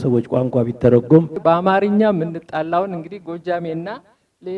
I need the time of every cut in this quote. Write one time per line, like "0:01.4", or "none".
0:01.3